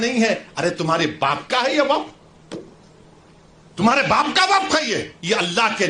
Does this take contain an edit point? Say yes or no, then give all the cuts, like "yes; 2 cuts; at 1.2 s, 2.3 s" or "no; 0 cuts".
no; 0 cuts